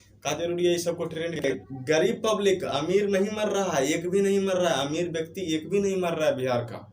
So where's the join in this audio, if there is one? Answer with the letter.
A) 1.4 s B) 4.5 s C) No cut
A